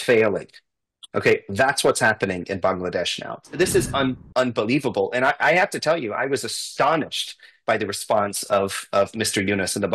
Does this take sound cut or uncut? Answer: cut